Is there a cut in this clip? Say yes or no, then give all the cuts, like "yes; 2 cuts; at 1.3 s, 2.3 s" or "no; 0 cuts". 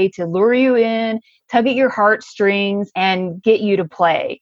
yes; 1 cut; at 2.9 s